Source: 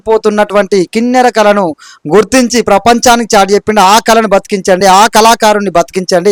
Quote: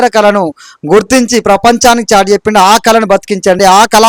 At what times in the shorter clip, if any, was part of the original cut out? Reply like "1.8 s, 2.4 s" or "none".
none